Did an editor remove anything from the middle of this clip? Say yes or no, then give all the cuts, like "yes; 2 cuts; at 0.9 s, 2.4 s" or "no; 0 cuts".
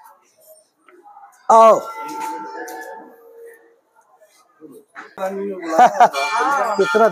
yes; 1 cut; at 5.2 s